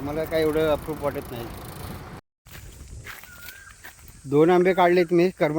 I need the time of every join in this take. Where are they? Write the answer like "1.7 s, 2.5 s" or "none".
2.3 s